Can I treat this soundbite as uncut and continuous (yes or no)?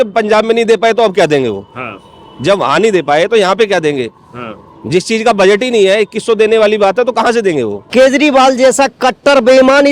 no